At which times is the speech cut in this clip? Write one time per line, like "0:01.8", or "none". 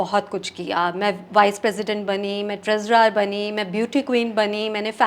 none

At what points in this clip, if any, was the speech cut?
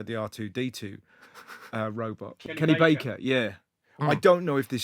0:02.6

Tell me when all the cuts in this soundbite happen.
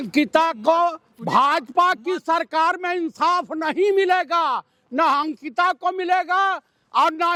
none

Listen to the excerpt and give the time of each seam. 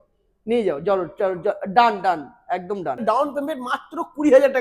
0:03.0

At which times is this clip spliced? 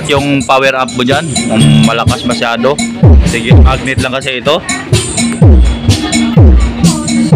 0:05.1

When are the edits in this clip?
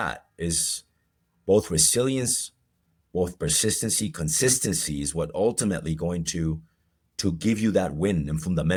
none

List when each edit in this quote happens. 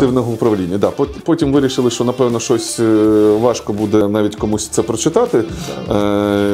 0:04.0

